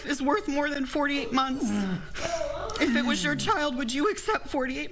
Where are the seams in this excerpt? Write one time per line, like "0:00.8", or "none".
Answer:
none